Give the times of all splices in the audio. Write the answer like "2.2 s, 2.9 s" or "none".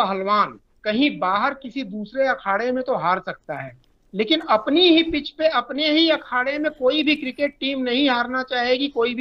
none